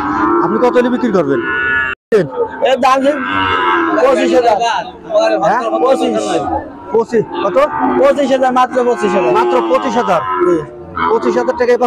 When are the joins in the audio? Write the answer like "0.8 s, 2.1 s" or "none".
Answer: 2.1 s